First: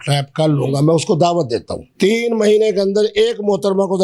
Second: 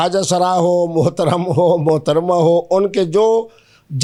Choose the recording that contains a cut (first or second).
first